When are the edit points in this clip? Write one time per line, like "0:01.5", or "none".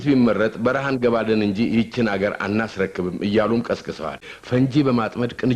0:04.2